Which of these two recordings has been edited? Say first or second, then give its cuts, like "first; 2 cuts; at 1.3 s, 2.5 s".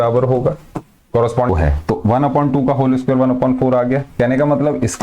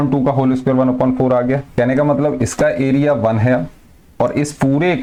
first; 1 cut; at 1.5 s